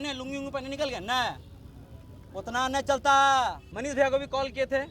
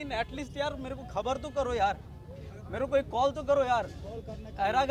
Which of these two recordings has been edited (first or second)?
first